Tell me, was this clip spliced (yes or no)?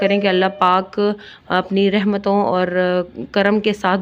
no